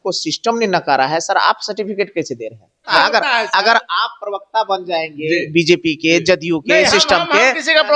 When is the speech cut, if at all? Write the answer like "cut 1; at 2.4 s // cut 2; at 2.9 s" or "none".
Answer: cut 1; at 2.9 s